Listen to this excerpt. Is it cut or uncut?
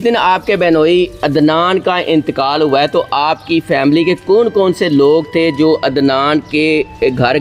uncut